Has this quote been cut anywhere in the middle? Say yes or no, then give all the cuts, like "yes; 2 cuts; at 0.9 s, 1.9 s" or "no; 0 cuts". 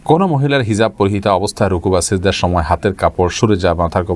no; 0 cuts